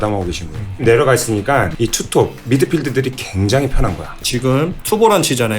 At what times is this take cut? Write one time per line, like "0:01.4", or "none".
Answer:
0:01.7
0:04.2